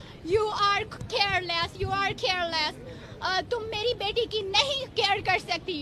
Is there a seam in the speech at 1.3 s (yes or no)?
no